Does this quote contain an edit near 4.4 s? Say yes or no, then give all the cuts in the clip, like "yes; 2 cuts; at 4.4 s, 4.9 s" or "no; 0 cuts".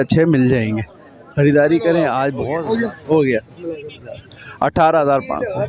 no; 1 cut; at 2.5 s